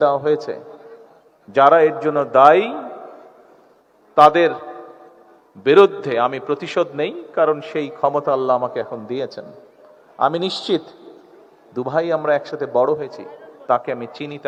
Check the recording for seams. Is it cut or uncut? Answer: uncut